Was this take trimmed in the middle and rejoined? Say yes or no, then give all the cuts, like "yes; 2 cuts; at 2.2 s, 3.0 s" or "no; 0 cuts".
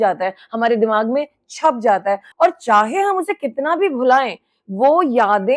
yes; 1 cut; at 2.3 s